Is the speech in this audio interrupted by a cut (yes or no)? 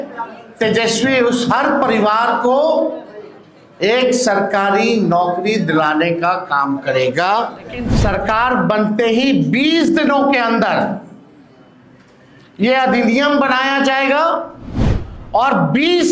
yes